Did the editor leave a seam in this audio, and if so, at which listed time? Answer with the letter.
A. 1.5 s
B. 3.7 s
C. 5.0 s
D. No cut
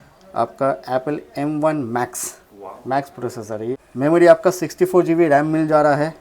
B